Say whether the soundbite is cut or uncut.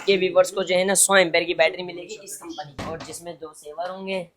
cut